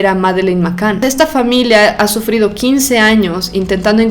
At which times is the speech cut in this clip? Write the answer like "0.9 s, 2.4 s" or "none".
1.0 s